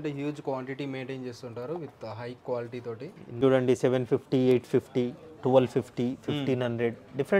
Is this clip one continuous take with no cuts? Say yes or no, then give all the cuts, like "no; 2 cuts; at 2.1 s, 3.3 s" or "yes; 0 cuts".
no; 1 cut; at 3.4 s